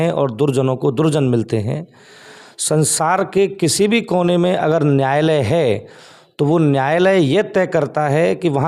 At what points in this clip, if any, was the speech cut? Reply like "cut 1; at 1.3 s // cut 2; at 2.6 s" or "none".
none